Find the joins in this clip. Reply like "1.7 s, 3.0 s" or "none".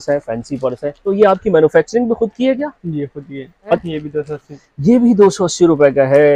1.0 s, 3.8 s